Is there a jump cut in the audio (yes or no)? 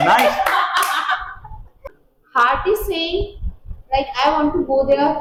no